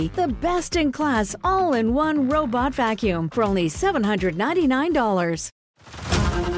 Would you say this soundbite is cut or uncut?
cut